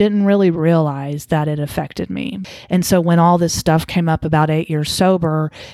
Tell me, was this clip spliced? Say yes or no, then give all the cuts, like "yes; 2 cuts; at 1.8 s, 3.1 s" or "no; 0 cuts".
yes; 1 cut; at 2.4 s